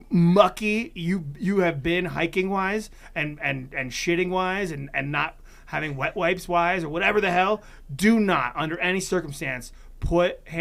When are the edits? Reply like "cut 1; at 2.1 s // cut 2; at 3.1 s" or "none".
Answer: none

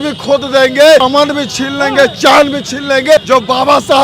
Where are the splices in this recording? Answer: cut 1; at 1.0 s // cut 2; at 3.2 s

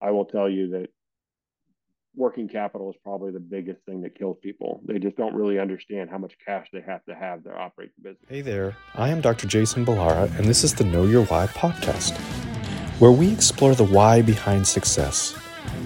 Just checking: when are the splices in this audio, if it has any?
cut 1; at 8.3 s

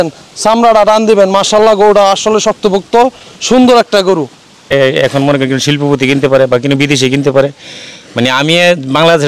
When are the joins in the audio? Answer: cut 1; at 4.6 s

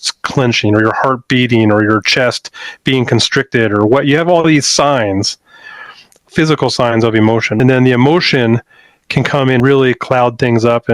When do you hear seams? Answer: cut 1; at 6.3 s // cut 2; at 7.6 s // cut 3; at 9.6 s

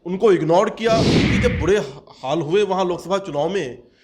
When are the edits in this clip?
cut 1; at 1.3 s

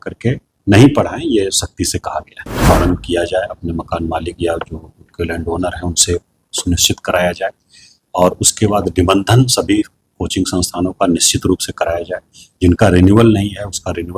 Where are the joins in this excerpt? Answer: cut 1; at 2.6 s

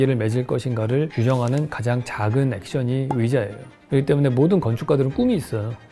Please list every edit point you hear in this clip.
cut 1; at 1.1 s

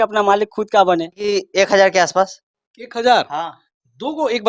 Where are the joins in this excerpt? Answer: cut 1; at 1.4 s

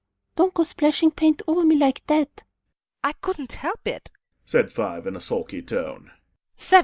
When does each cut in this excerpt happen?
cut 1; at 4.5 s

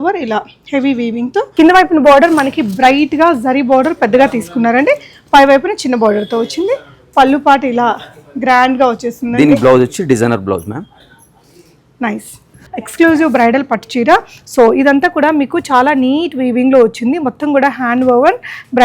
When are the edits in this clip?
cut 1; at 1.5 s // cut 2; at 10.9 s // cut 3; at 12.6 s

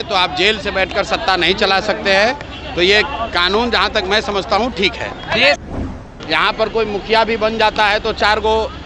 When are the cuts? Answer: cut 1; at 5.7 s

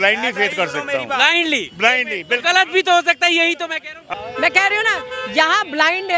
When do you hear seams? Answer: cut 1; at 4.0 s

